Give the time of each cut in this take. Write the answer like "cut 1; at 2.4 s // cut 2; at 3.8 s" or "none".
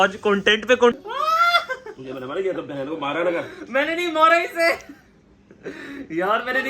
cut 1; at 0.9 s